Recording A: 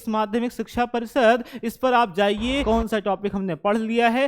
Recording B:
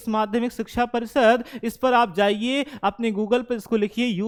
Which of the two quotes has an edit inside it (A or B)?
A